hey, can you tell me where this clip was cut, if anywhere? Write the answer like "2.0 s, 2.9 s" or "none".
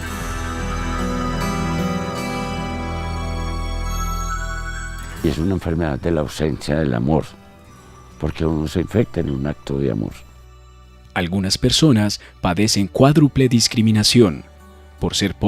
6.0 s